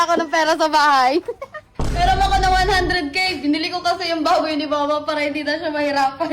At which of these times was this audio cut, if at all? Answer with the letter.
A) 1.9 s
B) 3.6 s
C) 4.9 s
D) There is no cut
A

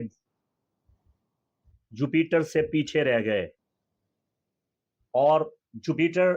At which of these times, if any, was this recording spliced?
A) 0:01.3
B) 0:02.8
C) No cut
C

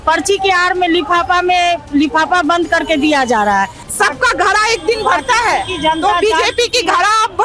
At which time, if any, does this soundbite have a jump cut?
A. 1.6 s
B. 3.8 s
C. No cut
B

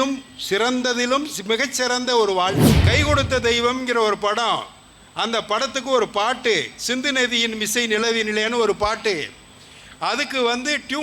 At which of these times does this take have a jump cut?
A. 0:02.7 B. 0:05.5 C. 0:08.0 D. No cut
A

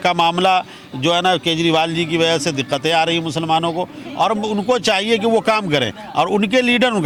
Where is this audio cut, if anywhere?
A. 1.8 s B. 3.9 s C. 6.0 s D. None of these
D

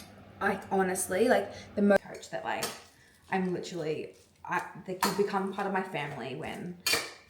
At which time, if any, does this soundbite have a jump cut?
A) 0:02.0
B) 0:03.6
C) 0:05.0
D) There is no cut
A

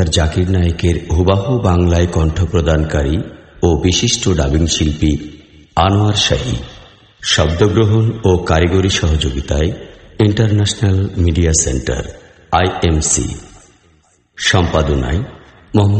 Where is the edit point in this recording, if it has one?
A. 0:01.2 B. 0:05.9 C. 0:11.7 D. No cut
A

